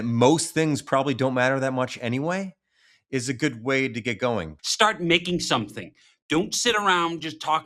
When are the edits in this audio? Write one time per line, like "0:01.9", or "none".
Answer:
0:04.6